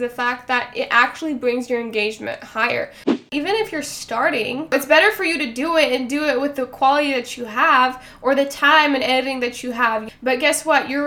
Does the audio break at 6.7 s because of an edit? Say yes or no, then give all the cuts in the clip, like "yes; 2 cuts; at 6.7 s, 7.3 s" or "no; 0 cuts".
no; 2 cuts; at 3.2 s, 4.6 s